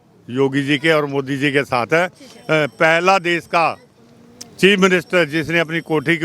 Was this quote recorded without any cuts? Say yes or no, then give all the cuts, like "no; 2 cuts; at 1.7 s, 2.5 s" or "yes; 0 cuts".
yes; 0 cuts